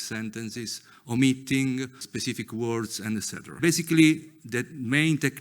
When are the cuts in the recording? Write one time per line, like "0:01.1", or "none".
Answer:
0:02.1
0:03.6